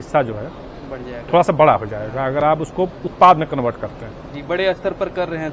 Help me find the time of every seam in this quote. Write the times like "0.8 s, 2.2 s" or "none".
none